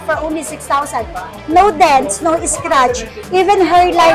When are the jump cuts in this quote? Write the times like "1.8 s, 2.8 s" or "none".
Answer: none